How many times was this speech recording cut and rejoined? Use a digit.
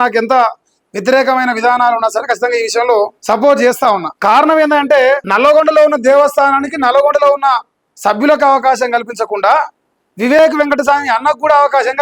3